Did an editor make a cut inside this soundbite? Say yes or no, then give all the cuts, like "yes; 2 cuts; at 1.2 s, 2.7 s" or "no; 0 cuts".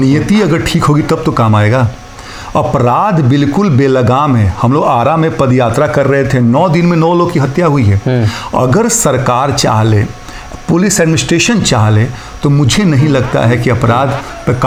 no; 0 cuts